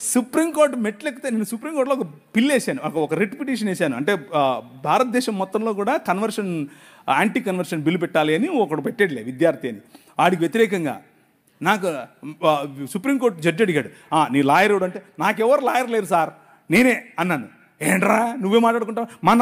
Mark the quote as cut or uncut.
uncut